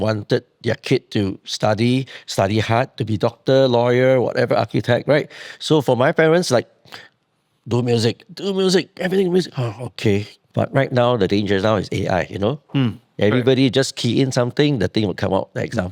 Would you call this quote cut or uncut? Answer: cut